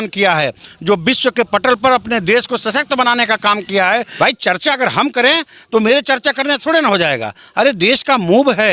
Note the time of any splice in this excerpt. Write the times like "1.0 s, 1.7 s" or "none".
4.1 s